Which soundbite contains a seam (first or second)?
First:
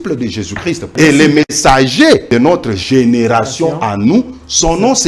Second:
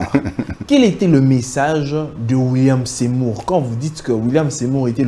first